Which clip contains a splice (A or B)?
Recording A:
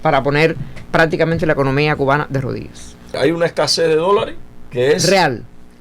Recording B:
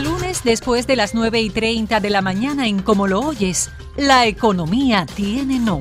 A